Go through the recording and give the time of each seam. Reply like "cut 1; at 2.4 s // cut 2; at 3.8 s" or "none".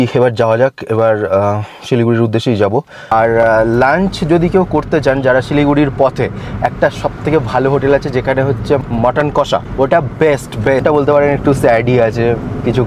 cut 1; at 3.1 s // cut 2; at 8.8 s // cut 3; at 9.7 s // cut 4; at 10.8 s